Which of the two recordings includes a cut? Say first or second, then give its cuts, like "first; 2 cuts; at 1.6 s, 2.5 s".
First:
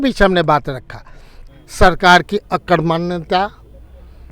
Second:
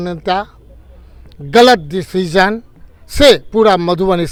first; 1 cut; at 1.4 s